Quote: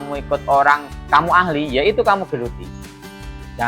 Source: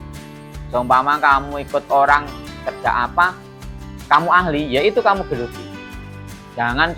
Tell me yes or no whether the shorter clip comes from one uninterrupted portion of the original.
no